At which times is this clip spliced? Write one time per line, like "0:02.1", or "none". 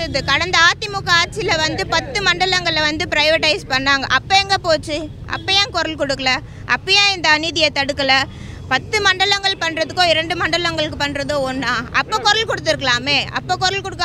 none